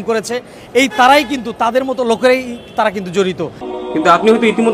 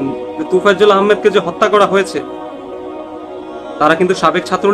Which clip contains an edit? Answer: first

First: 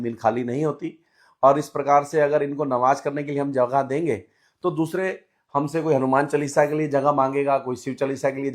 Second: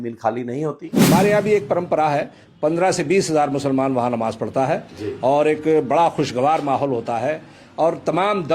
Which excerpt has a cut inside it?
second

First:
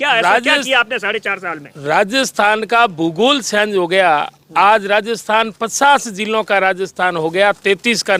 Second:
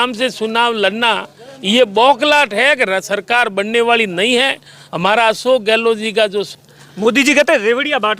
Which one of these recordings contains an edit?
second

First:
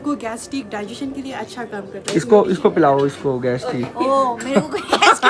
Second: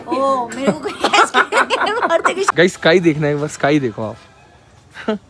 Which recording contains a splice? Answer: second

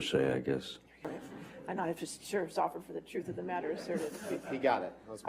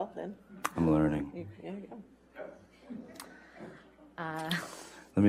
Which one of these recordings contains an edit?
first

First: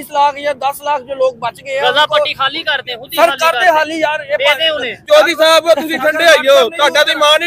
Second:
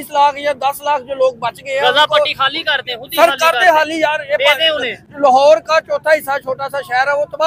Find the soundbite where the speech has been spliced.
first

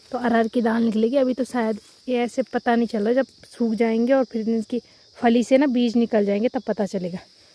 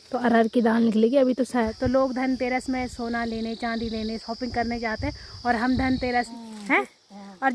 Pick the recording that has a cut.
second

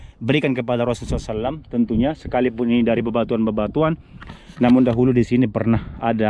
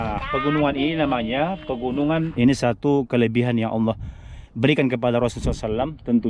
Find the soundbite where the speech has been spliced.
second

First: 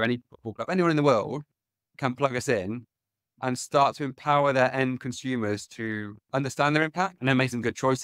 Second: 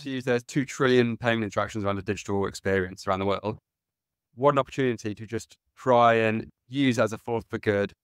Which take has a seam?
first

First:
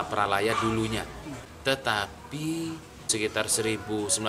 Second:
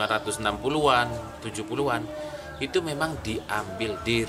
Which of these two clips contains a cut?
first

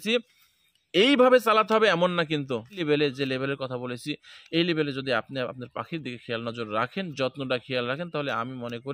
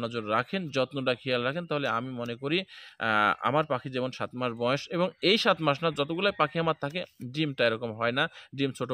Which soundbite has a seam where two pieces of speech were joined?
first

